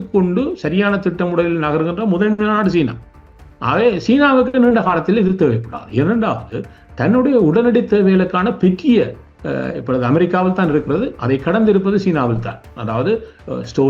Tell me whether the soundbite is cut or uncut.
uncut